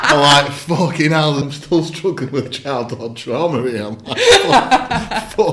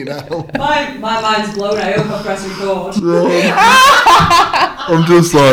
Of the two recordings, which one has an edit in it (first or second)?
first